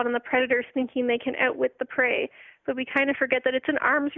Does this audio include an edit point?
no; 0 cuts

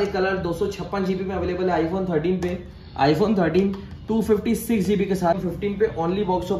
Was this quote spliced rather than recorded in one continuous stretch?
yes; 1 cut; at 5.4 s

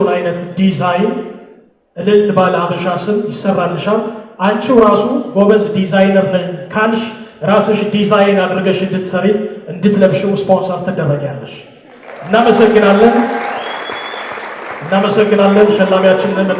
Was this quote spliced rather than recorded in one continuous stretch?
no; 0 cuts

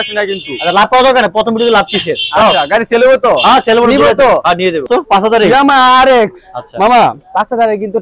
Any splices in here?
yes; 1 cut; at 4.9 s

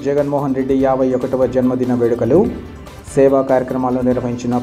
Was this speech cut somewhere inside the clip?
no; 0 cuts

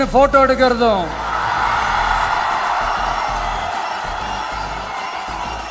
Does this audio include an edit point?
no; 0 cuts

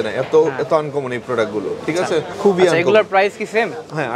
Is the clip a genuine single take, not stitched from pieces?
yes; 0 cuts

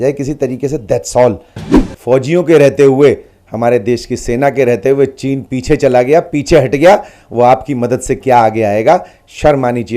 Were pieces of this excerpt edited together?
yes; 1 cut; at 1.9 s

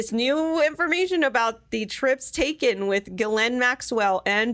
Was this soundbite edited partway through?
no; 0 cuts

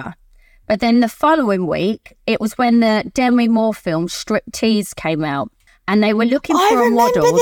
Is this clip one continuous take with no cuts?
yes; 0 cuts

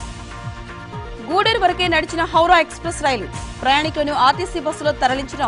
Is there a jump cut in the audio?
yes; 1 cut; at 1.1 s

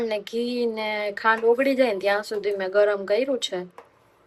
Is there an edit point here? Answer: no; 0 cuts

